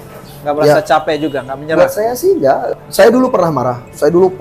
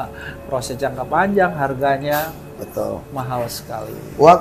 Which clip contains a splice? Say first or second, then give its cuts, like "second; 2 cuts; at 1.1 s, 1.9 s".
first; 1 cut; at 2.7 s